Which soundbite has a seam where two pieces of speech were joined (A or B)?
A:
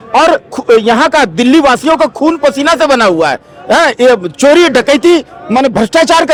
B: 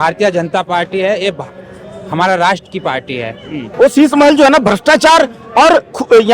B